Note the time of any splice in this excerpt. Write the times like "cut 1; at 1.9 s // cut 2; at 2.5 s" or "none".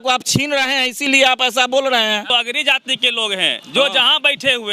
cut 1; at 2.3 s